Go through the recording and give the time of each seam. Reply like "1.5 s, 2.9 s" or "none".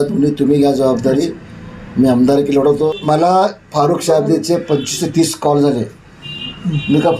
3.0 s